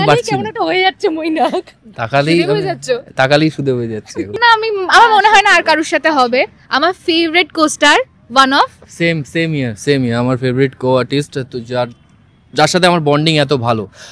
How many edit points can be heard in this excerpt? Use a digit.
1